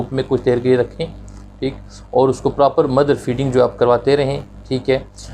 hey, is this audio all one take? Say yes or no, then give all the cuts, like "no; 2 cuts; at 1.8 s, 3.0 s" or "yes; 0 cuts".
yes; 0 cuts